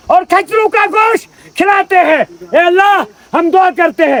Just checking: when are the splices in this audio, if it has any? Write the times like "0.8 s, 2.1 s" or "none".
none